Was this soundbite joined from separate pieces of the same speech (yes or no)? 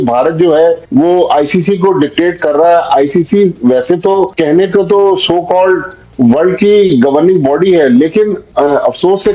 no